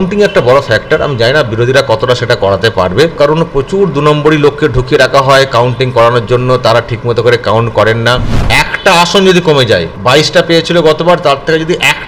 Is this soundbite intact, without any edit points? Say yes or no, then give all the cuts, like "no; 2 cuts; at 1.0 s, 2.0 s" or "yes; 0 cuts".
no; 3 cuts; at 3.1 s, 8.3 s, 9.9 s